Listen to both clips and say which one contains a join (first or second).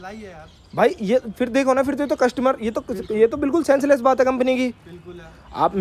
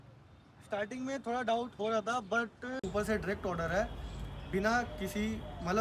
second